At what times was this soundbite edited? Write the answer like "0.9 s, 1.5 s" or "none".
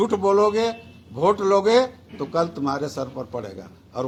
none